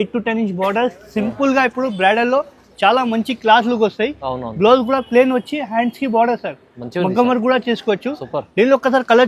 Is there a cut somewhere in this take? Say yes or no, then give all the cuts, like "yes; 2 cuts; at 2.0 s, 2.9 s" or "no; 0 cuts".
no; 0 cuts